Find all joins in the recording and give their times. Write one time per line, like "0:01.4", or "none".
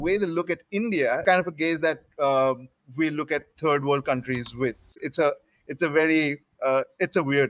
0:01.2
0:04.9